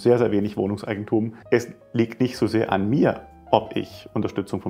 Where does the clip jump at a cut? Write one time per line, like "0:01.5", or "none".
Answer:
0:01.4